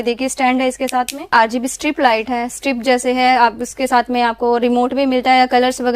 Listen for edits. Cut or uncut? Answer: cut